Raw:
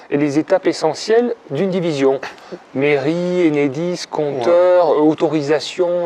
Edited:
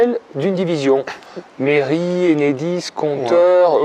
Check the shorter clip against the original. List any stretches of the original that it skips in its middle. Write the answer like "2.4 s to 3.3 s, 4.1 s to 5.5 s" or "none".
none